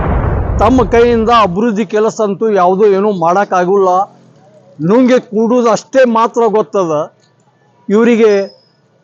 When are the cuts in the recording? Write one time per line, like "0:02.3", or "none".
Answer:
none